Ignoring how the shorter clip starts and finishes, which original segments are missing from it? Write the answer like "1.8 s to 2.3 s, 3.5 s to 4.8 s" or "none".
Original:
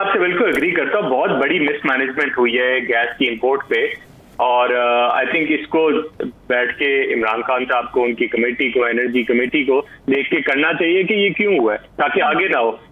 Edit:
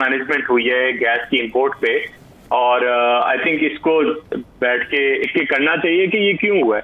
7.2 s to 10.2 s

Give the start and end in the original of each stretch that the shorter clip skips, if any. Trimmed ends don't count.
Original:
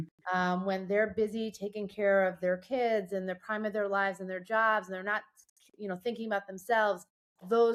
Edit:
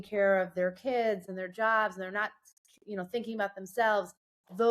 3.1 s to 4.2 s

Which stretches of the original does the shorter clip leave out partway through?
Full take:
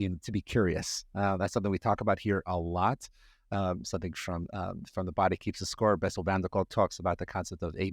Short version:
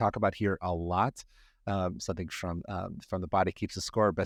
none

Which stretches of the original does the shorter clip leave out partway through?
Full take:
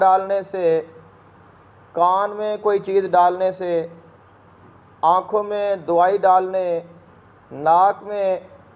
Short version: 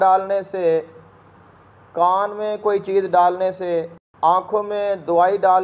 4.0 s to 4.8 s

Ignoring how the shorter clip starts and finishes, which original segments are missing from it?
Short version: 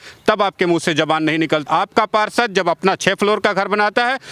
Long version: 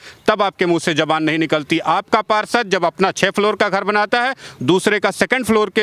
1.7 s to 1.8 s

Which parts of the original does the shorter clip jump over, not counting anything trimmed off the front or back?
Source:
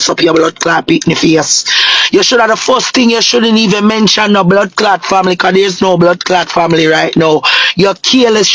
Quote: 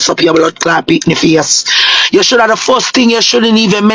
none

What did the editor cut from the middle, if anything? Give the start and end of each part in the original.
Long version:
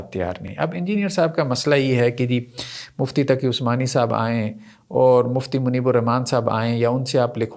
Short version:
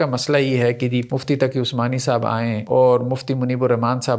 2.5 s to 3.0 s, 4.5 s to 4.8 s

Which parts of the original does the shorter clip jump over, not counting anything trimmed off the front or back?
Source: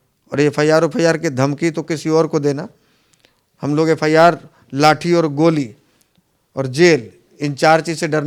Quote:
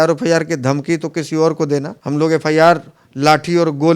2.7 s to 3.5 s

